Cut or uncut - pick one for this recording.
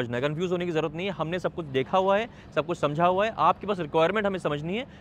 uncut